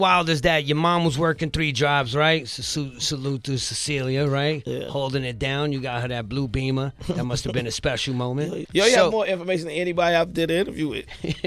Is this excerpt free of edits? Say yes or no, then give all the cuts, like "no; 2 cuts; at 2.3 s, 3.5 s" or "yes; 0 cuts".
no; 1 cut; at 8.6 s